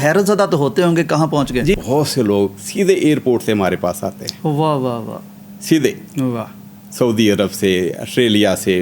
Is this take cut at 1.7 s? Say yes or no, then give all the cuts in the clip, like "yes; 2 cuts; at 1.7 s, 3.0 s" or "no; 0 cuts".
yes; 1 cut; at 1.7 s